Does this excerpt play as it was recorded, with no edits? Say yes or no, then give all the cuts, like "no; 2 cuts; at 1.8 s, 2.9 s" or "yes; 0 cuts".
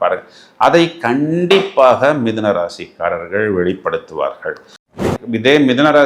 no; 1 cut; at 5.0 s